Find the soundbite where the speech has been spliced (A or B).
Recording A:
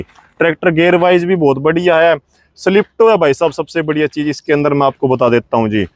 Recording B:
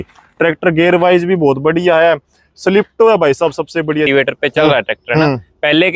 B